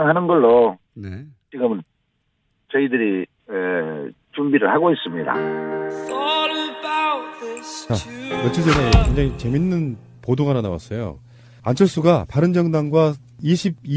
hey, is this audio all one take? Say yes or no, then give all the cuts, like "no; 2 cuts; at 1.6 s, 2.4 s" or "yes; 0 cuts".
no; 1 cut; at 5.3 s